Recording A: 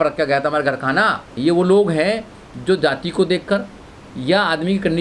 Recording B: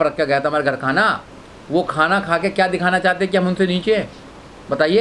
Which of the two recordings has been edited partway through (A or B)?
A